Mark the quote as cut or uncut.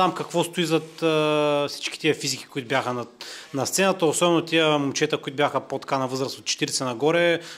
uncut